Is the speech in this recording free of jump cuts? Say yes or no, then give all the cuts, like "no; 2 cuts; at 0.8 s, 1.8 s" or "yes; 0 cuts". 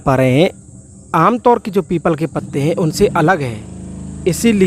yes; 0 cuts